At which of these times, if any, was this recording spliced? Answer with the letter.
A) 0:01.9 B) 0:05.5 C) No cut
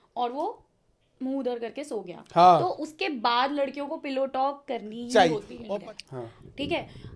B